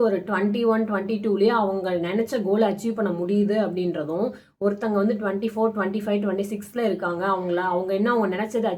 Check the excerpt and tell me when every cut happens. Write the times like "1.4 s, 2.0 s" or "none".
none